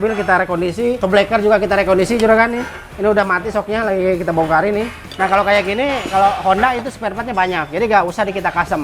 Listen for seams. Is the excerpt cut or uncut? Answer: cut